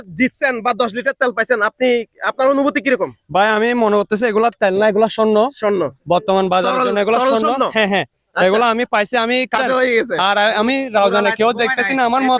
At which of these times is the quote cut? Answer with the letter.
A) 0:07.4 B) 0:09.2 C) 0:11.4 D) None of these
B